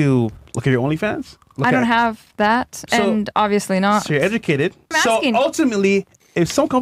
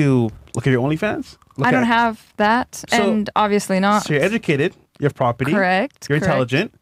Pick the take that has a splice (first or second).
first